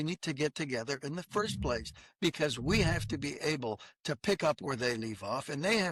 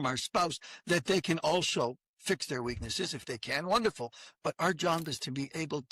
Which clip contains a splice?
second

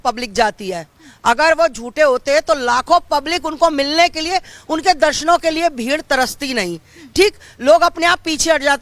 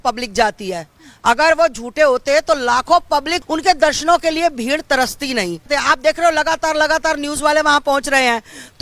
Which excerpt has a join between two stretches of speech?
second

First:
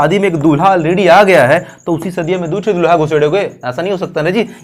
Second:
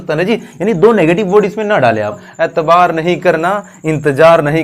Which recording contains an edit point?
second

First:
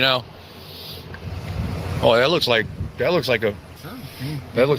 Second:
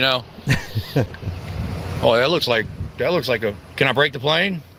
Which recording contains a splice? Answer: first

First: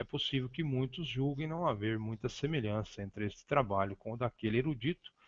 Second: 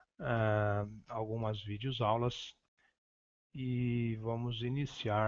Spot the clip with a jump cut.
first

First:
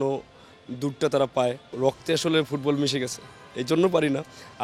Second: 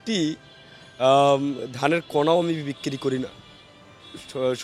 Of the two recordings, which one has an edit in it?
first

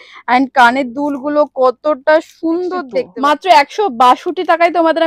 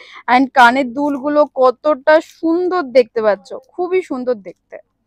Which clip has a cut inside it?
first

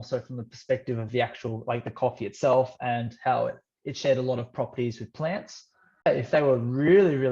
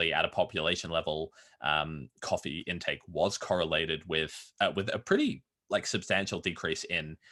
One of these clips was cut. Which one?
first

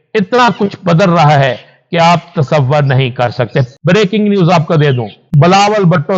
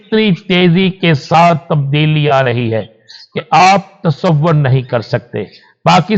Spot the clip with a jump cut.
first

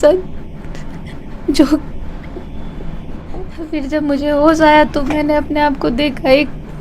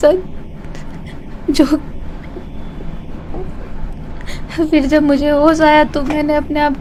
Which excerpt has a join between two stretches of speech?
first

